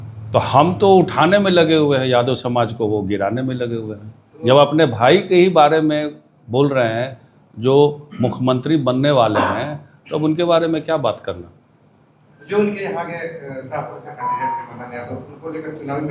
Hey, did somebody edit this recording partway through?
no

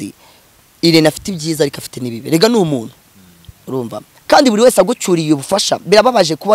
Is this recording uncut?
no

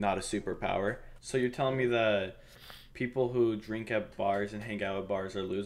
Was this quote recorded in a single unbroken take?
no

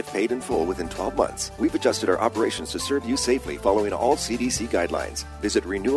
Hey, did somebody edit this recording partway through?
yes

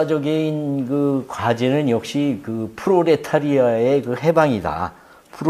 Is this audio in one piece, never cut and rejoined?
no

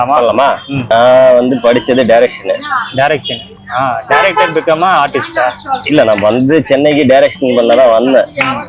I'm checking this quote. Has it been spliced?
yes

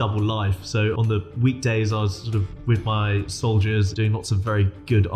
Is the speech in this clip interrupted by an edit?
yes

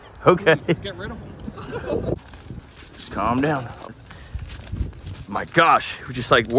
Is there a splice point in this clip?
yes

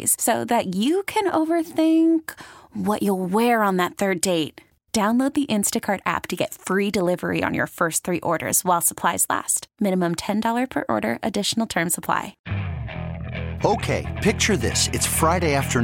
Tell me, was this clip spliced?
yes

